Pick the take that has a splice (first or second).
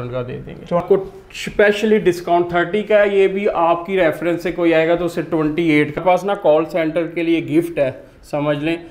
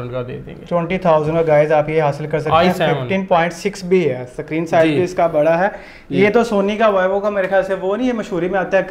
first